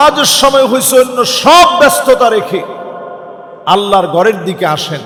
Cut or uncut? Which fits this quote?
uncut